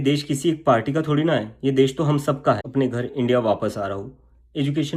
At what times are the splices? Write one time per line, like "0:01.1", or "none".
0:02.7